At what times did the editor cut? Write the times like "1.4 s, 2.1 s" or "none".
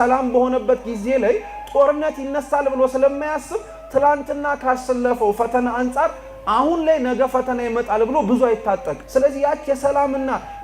9.0 s